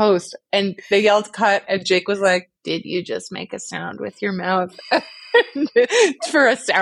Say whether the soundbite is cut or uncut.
cut